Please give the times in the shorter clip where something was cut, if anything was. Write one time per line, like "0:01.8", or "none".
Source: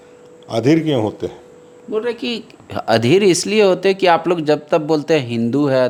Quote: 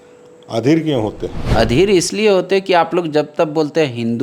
0:01.4